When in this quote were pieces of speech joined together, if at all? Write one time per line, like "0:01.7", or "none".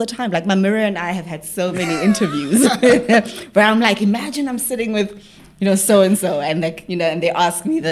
none

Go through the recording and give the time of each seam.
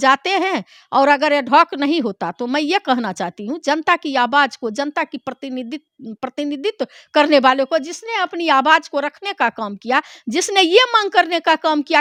none

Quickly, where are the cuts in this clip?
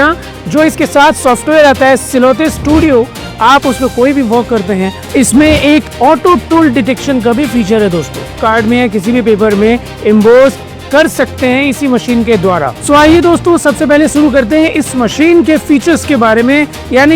0:05.0
0:08.4
0:12.7

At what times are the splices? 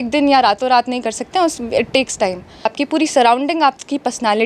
0:02.7

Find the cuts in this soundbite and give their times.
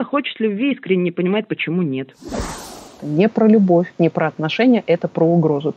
0:02.4
0:03.9

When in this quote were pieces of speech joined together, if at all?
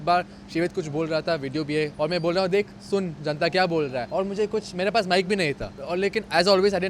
0:01.9
0:04.0
0:05.7

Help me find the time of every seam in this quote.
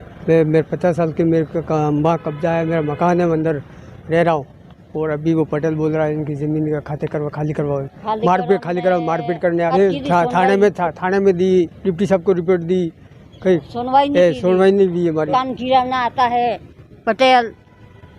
0:09.7
0:15.3

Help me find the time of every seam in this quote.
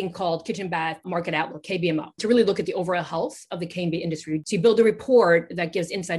0:01.0
0:02.2
0:04.4

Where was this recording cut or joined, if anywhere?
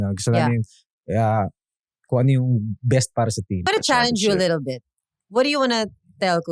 0:03.7

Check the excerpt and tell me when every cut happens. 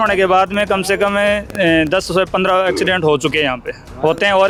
none

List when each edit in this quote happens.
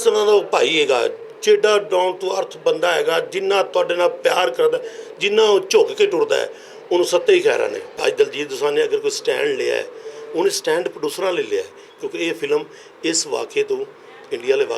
0:08.0

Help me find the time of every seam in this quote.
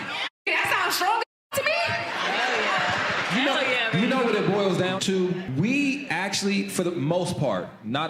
0:02.4

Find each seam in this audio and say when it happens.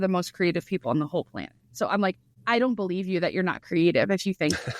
0:02.3

